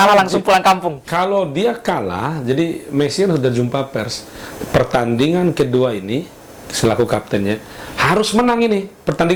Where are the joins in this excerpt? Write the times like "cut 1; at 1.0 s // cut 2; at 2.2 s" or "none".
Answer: none